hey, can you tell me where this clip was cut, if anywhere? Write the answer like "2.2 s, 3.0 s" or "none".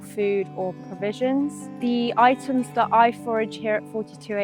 1.6 s